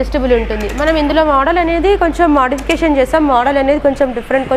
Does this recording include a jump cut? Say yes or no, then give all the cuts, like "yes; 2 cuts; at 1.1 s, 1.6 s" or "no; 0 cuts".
no; 0 cuts